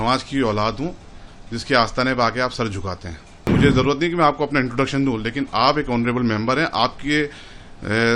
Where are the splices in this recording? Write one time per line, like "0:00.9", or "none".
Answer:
0:03.6